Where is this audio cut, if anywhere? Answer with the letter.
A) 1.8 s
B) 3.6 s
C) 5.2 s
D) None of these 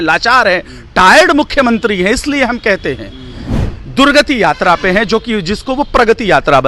B